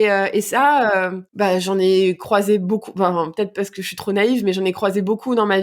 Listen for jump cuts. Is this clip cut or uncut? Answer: cut